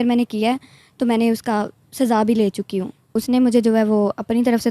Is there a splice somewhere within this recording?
yes; 1 cut; at 3.1 s

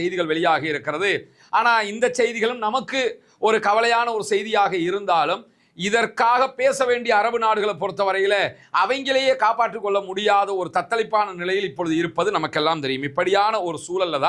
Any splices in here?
no; 0 cuts

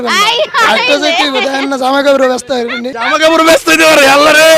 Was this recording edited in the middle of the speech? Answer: no; 0 cuts

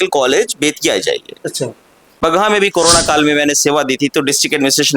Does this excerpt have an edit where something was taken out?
yes; 1 cut; at 2.0 s

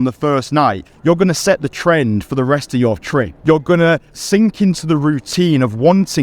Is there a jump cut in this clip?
yes; 1 cut; at 3.3 s

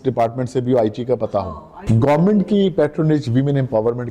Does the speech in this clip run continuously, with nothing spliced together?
no; 1 cut; at 1.8 s

